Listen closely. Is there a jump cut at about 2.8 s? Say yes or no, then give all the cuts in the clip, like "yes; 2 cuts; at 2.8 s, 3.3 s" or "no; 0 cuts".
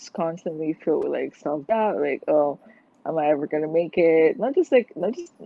no; 0 cuts